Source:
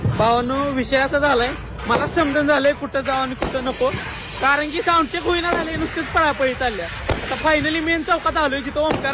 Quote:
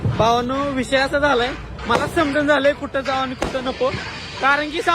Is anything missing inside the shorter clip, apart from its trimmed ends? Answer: no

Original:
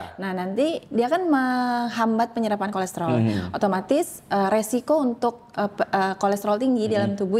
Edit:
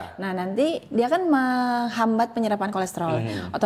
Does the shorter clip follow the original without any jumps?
yes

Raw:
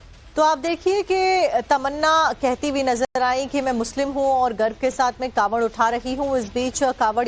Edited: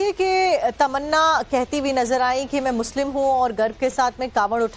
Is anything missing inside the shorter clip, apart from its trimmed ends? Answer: yes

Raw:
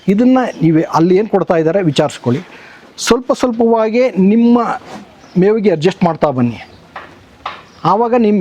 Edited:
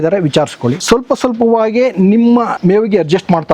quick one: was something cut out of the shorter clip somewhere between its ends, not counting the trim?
yes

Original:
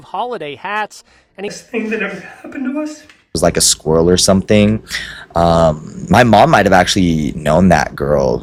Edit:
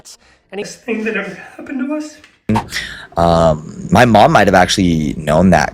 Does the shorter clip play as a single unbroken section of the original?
no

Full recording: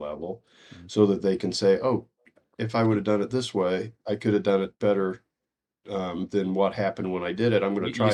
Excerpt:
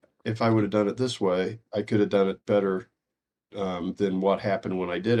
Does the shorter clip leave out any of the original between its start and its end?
no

